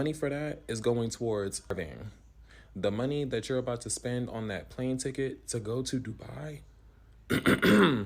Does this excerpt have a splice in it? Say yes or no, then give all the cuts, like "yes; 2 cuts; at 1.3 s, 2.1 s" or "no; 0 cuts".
yes; 1 cut; at 1.7 s